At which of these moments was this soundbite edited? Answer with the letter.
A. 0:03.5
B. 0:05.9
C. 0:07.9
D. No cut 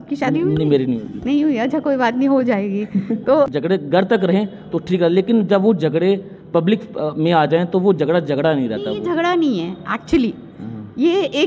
A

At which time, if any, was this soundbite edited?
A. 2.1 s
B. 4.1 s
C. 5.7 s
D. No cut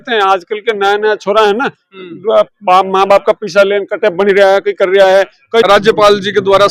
C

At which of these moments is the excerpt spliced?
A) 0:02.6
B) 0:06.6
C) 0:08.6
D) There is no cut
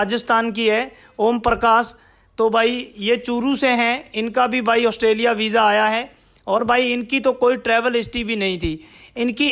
D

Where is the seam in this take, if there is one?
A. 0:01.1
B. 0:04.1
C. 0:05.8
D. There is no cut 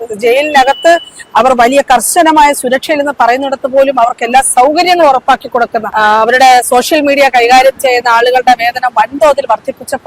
C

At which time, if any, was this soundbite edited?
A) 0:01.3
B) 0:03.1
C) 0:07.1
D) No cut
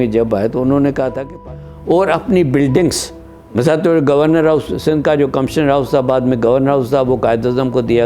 A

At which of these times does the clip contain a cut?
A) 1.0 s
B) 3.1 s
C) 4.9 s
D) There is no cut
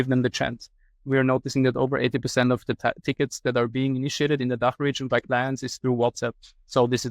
A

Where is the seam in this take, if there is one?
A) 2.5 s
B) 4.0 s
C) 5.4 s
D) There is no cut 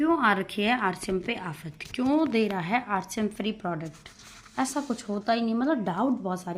D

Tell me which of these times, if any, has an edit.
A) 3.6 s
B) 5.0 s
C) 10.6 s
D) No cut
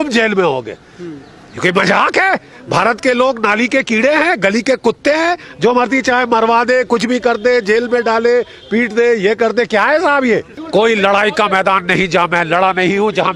C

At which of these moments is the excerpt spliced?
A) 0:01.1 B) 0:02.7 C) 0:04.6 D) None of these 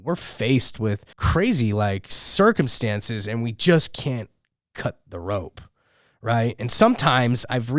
A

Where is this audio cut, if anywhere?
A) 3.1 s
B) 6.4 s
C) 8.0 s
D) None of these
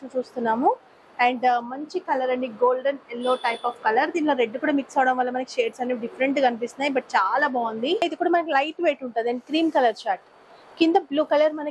C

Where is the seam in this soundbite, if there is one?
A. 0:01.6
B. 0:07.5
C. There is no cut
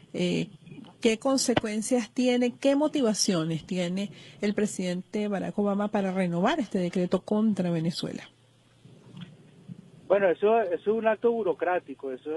B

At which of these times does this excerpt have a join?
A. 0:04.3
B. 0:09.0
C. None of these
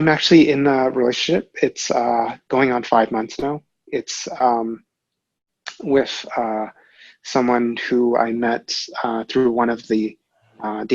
C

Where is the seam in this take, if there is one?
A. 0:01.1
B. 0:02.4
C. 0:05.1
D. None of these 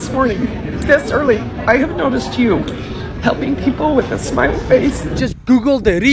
C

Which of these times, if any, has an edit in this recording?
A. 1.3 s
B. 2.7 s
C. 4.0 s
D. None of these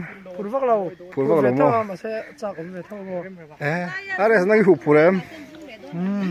C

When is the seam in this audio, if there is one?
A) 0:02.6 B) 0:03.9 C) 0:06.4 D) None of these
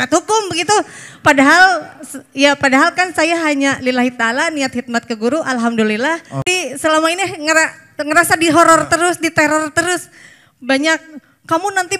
C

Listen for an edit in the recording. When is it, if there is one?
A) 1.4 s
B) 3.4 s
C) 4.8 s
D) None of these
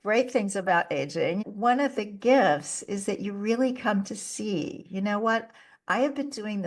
A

